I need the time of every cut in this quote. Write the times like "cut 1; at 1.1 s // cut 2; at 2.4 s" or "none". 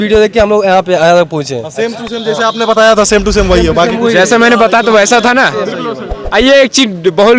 none